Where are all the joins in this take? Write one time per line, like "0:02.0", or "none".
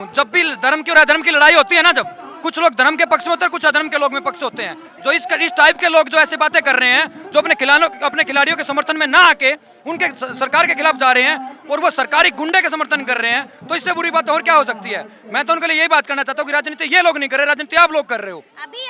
none

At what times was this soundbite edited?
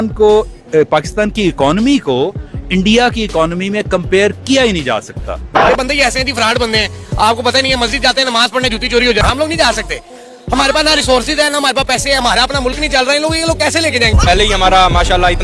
0:05.5
0:09.2
0:14.2

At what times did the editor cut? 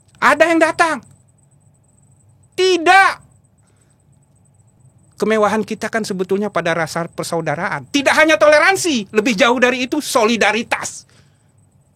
0:04.7

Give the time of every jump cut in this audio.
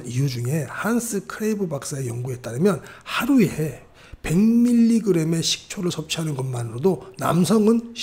none

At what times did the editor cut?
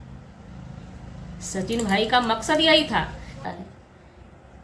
0:03.4

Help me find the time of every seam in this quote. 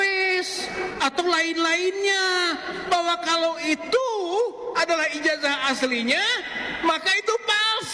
none

